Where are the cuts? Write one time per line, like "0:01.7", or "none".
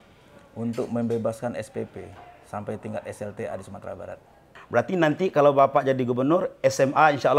0:04.6